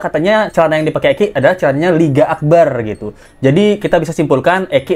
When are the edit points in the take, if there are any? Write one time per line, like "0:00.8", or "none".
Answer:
none